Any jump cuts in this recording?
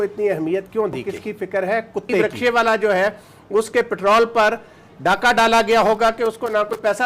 yes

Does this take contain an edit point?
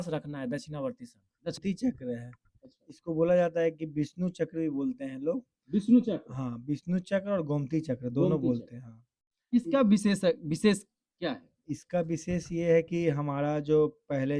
yes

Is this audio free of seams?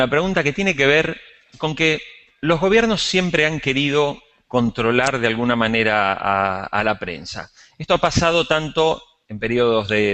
yes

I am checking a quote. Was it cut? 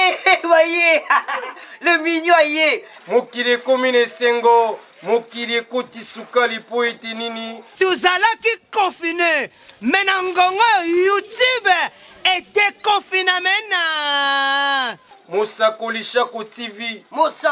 no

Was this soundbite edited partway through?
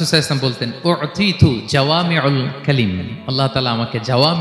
no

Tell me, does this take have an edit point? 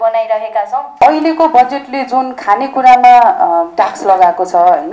yes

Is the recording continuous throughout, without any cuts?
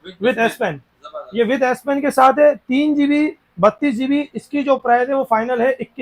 yes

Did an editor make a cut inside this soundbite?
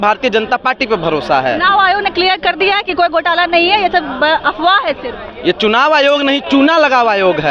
no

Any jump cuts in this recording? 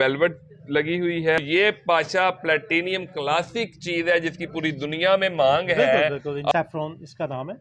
yes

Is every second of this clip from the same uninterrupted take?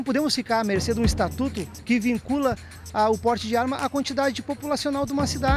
yes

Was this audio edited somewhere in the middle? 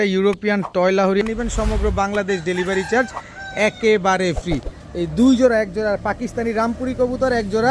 yes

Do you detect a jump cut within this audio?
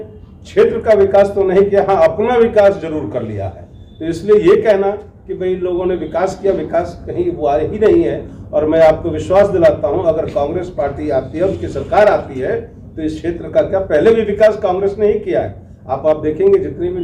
no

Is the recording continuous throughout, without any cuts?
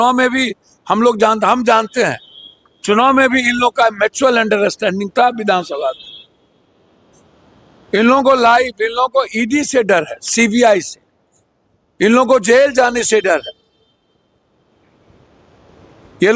yes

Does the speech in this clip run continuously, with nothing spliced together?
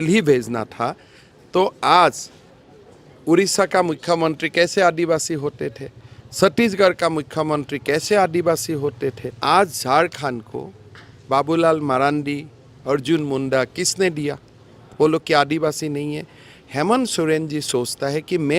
no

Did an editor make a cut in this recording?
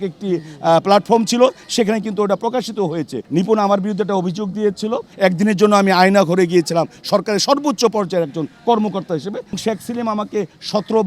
yes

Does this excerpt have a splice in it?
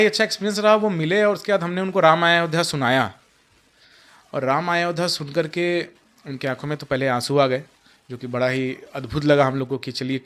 no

